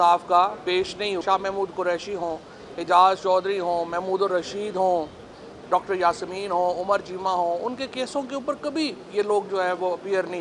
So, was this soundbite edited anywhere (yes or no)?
yes